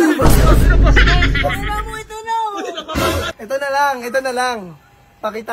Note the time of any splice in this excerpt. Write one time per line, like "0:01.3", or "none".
0:03.3